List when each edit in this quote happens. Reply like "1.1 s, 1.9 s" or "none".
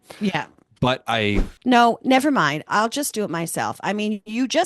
1.5 s